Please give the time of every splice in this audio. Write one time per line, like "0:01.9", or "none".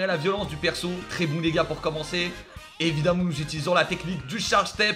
0:01.1